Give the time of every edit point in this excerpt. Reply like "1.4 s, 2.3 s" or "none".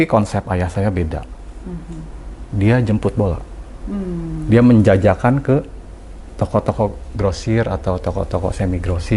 none